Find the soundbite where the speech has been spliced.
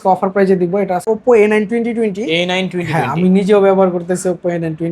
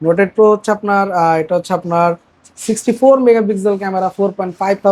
first; 1 cut; at 1.0 s

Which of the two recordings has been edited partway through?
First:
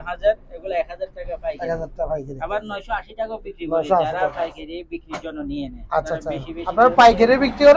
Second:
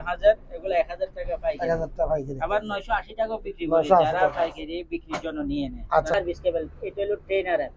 second; 1 cut; at 6.1 s

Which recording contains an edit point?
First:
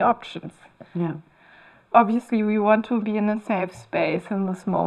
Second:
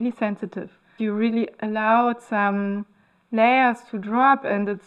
second; 1 cut; at 0.9 s

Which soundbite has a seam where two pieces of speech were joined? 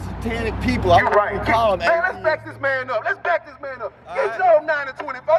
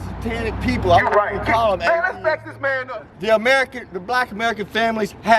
second; 1 cut; at 2.9 s

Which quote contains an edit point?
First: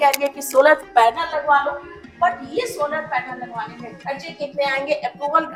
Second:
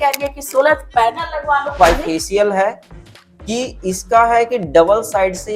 second; 1 cut; at 1.8 s

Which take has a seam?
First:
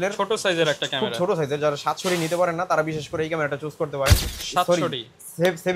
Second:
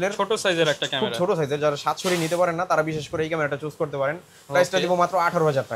first; 1 cut; at 4.4 s

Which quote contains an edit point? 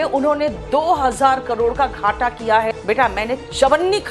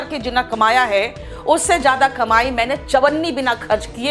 first; 1 cut; at 2.8 s

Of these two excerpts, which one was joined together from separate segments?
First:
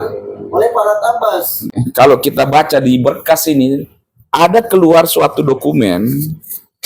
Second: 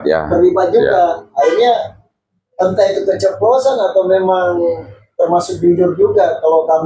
first; 1 cut; at 1.7 s

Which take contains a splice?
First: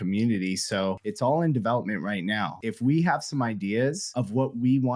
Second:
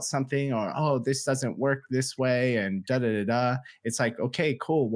first; 3 cuts; at 1.1 s, 2.6 s, 4.0 s

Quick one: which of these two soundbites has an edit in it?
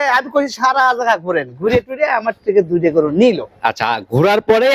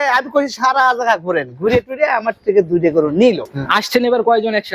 second; 1 cut; at 3.5 s

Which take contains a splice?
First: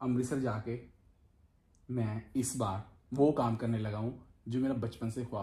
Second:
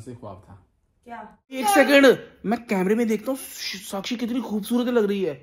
second; 1 cut; at 1.6 s

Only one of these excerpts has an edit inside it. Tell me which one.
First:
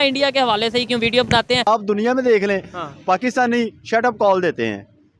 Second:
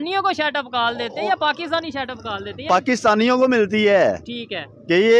first; 1 cut; at 1.7 s

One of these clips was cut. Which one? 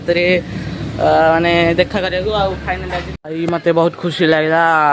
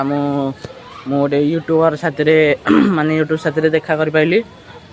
first; 1 cut; at 3.1 s

